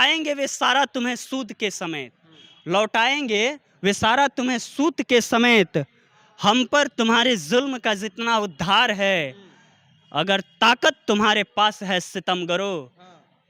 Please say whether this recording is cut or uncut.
uncut